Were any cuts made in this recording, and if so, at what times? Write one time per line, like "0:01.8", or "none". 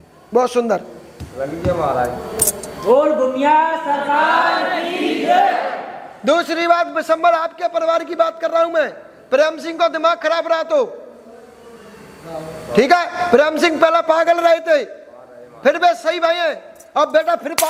none